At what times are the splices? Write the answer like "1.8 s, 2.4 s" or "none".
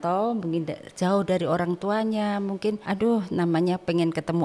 2.8 s